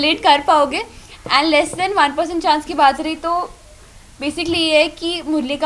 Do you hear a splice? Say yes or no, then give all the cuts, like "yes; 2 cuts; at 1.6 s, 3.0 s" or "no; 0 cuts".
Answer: no; 0 cuts